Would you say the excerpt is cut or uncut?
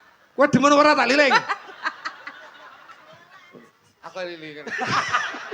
uncut